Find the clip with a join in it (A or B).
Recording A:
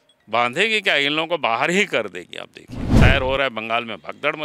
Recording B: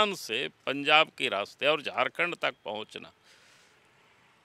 A